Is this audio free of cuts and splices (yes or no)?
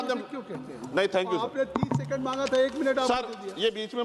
yes